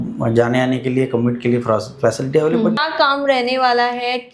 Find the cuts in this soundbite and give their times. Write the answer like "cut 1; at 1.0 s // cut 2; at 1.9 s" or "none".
cut 1; at 2.8 s